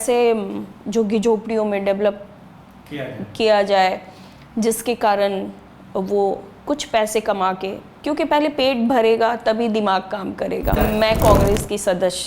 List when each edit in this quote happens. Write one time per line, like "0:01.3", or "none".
0:10.8